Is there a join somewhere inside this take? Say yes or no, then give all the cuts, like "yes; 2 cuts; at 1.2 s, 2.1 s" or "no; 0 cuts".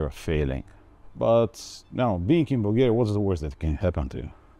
yes; 1 cut; at 1.0 s